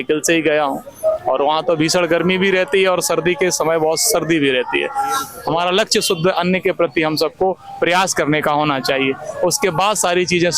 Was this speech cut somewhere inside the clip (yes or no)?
yes